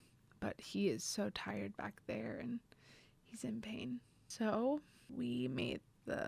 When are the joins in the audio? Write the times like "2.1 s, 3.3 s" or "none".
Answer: 4.2 s, 5.1 s